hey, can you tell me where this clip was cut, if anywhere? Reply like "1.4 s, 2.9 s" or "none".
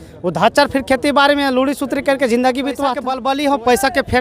3.1 s